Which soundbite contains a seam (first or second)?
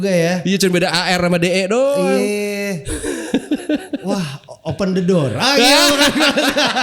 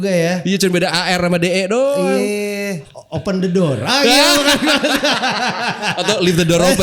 second